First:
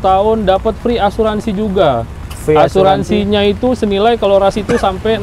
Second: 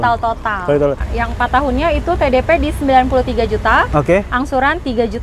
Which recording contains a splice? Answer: second; 1 cut; at 1.1 s

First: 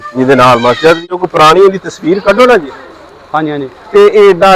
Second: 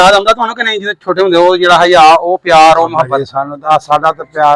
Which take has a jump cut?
first; 1 cut; at 1.0 s

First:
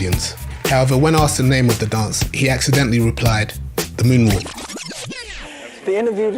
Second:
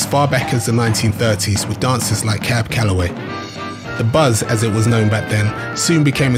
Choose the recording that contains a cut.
first; 1 cut; at 3.2 s

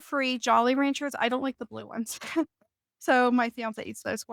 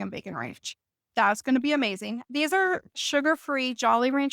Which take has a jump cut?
second; 1 cut; at 2.2 s

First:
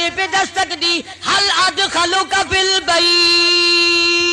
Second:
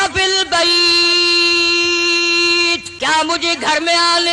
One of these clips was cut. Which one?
second; 1 cut; at 2.9 s

